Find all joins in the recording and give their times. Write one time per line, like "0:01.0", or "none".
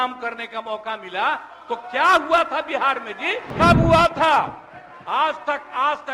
0:03.5